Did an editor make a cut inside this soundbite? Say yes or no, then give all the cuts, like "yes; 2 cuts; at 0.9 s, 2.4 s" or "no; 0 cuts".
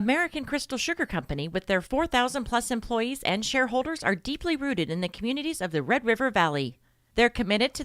yes; 1 cut; at 1.3 s